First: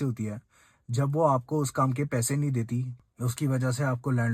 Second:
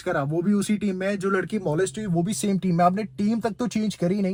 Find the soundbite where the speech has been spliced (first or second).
first